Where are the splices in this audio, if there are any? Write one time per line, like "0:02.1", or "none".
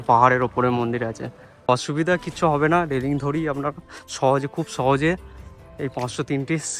0:01.7